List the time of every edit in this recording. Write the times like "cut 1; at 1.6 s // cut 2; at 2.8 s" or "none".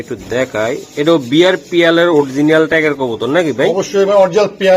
none